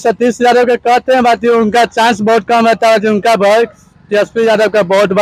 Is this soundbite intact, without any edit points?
yes; 0 cuts

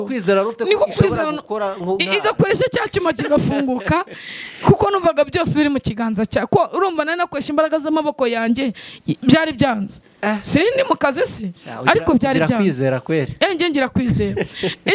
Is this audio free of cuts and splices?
yes; 0 cuts

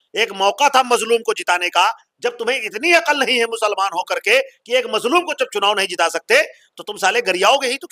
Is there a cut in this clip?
no; 0 cuts

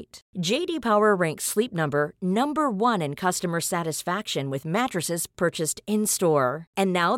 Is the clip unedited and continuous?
yes; 0 cuts

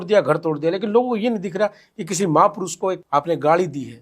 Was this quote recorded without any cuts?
no; 1 cut; at 3.0 s

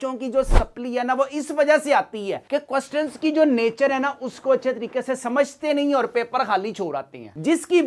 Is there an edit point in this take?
no; 0 cuts

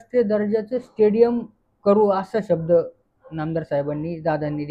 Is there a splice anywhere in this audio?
no; 0 cuts

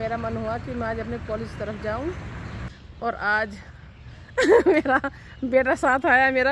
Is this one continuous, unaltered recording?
no; 1 cut; at 2.6 s

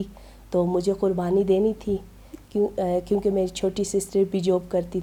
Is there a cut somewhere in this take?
no; 0 cuts

